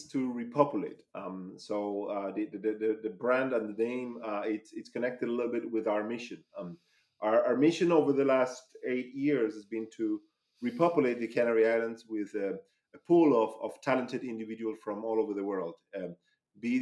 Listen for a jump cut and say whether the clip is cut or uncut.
uncut